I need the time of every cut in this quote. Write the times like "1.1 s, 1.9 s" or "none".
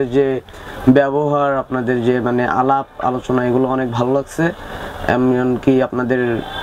none